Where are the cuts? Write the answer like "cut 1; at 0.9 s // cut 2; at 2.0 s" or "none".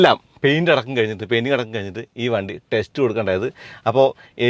none